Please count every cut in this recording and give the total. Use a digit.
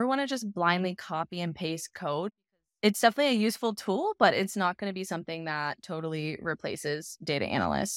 1